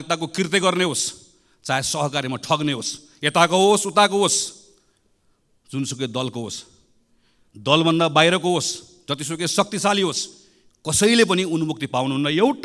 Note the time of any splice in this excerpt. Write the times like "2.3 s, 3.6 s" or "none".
none

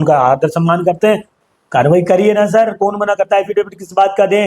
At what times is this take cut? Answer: 1.4 s

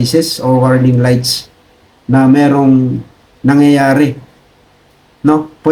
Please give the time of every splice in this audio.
none

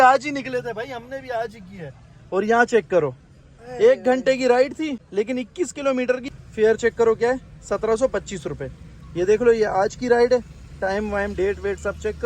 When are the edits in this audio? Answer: 5.0 s, 6.2 s

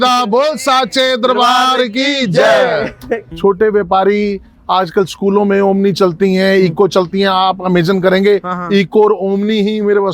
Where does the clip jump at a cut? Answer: 3.3 s

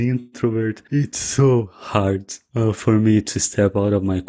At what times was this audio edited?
none

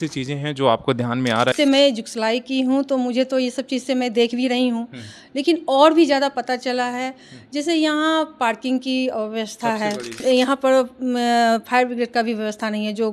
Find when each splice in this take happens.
1.5 s, 10.2 s

